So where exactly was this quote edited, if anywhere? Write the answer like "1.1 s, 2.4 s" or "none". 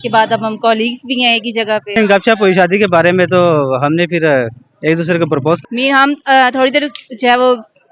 1.9 s, 5.6 s

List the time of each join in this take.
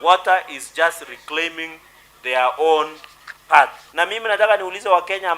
3.8 s

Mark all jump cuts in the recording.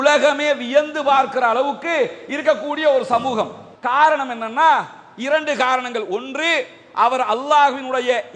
3.7 s

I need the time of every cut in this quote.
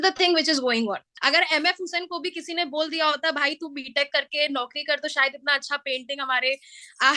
1.1 s

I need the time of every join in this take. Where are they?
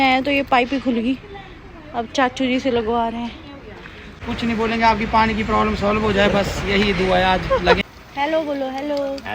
4.1 s, 7.8 s

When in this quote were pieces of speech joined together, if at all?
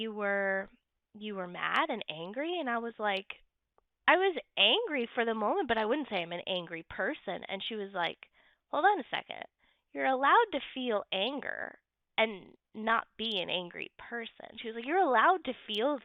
none

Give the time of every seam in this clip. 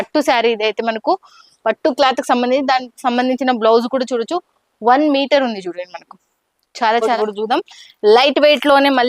7.2 s

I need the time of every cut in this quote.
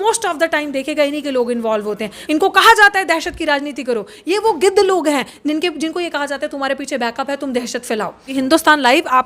2.1 s, 8.3 s

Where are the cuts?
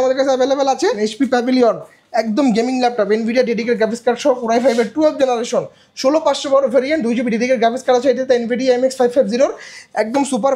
1.0 s

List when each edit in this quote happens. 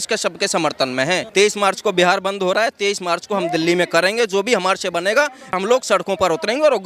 1.2 s, 5.6 s

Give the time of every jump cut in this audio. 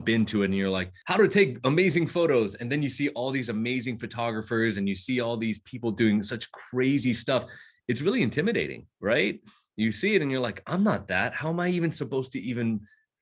0.9 s

